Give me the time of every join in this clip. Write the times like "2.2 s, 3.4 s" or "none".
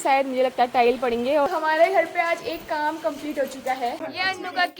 1.5 s, 4.0 s